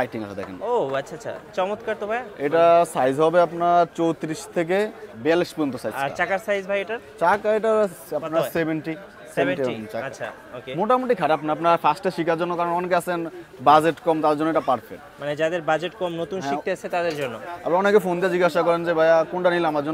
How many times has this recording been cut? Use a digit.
0